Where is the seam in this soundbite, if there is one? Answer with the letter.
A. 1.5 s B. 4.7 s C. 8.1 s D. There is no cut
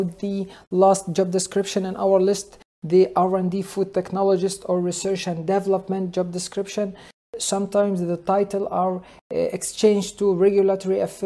A